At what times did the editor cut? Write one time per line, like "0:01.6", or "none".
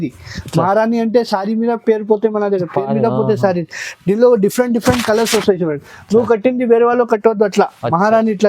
none